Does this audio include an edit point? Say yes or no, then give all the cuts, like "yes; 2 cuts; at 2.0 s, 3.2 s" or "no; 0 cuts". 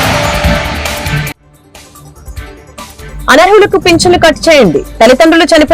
yes; 1 cut; at 3.1 s